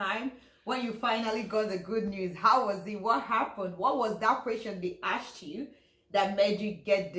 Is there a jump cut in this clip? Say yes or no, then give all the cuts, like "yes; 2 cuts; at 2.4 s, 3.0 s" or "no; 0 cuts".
no; 0 cuts